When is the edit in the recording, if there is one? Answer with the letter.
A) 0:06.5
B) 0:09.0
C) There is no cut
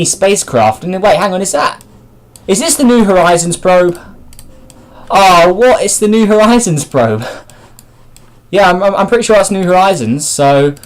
B